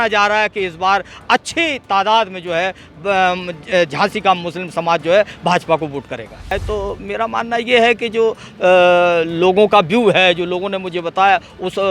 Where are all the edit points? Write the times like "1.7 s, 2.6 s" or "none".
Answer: 6.6 s